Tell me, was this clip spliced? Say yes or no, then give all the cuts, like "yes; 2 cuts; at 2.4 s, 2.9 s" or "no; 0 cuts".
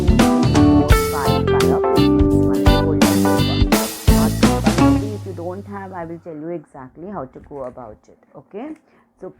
yes; 1 cut; at 5.1 s